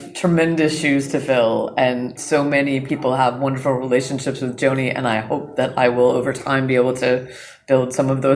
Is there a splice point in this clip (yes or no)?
no